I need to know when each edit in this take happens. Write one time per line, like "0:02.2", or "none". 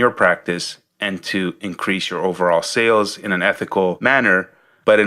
none